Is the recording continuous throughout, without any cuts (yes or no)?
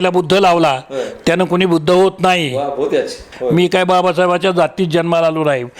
no